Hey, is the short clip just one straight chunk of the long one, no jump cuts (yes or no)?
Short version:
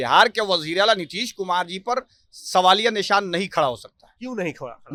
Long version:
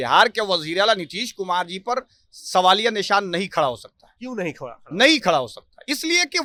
yes